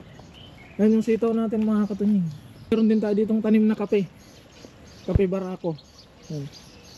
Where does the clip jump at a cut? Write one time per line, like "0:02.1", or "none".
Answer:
0:02.7